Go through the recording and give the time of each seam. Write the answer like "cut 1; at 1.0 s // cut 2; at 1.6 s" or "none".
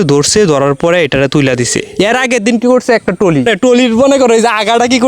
cut 1; at 1.8 s // cut 2; at 3.5 s